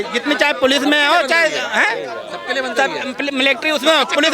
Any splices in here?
no; 0 cuts

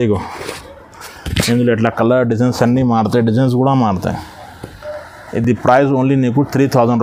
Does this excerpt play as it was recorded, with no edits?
yes; 0 cuts

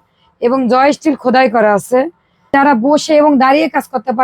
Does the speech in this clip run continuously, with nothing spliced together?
no; 1 cut; at 2.5 s

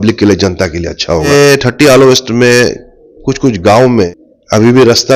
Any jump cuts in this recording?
yes; 2 cuts; at 1.3 s, 4.1 s

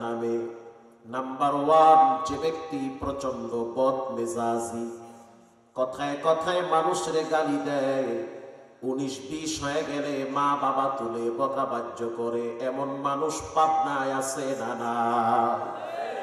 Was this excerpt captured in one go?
yes; 0 cuts

